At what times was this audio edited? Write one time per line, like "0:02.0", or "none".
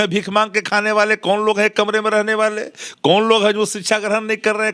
none